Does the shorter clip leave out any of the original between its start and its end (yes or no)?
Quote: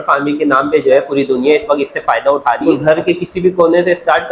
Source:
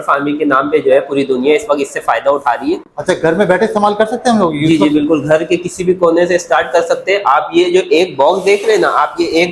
yes